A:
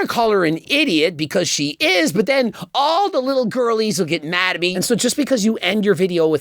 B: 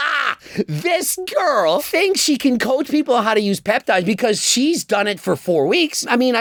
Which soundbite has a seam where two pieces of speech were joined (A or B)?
A